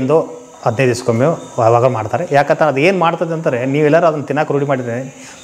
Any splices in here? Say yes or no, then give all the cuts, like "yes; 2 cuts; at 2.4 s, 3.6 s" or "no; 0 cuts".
no; 0 cuts